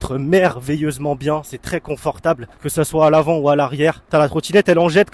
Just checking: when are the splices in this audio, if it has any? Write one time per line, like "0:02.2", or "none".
0:02.5
0:04.0